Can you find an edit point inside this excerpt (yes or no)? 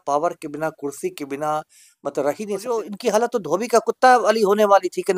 yes